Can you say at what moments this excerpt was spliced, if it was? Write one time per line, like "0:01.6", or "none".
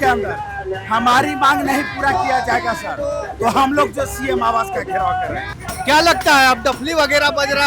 0:05.6

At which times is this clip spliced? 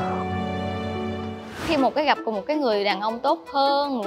0:01.6

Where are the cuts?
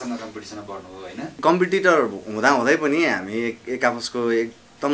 0:01.4

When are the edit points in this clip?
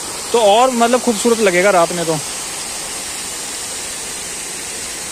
none

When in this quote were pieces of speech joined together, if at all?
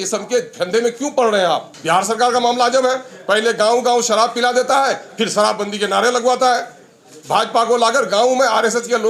0:01.7

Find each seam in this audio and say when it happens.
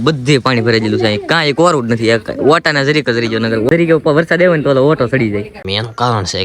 0:03.7
0:05.5

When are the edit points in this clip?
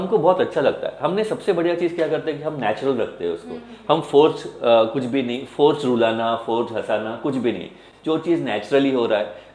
none

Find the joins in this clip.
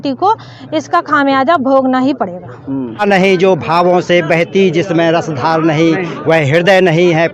0:03.0

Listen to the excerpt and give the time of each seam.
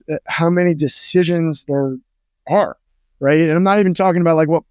none

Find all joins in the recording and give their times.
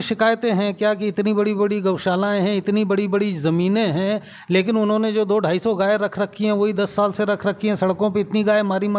none

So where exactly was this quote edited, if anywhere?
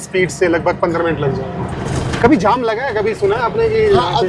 0:01.7

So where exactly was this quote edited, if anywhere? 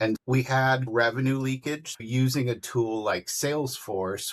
0:00.9
0:02.0

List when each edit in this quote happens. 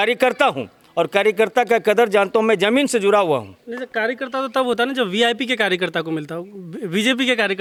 none

